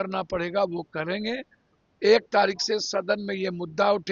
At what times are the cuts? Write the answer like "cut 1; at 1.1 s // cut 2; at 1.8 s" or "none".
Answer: none